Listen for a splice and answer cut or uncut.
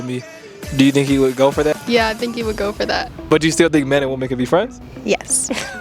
cut